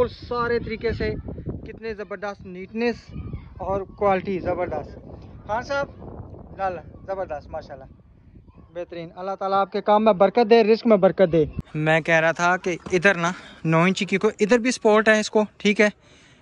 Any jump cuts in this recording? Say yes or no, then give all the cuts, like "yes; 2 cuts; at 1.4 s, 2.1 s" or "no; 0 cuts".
yes; 1 cut; at 11.6 s